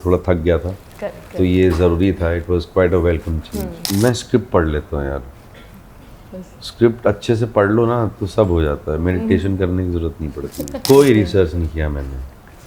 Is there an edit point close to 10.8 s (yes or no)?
yes